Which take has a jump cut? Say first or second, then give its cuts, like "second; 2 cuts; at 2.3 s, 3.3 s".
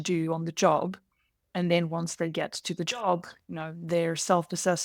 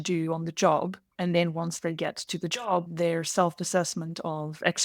second; 2 cuts; at 1.0 s, 2.9 s